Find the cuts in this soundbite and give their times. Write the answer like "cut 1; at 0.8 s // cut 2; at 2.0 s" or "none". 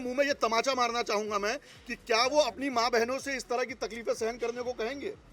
none